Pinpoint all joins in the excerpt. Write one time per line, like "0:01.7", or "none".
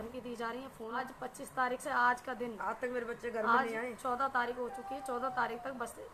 0:01.0